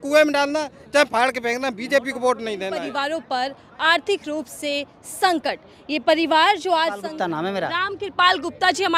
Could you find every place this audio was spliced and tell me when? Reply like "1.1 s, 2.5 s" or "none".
2.8 s, 7.1 s